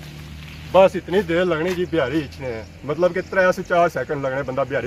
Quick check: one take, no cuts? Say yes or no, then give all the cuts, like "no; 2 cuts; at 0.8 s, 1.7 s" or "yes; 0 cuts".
yes; 0 cuts